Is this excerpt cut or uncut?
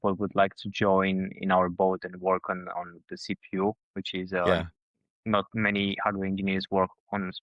uncut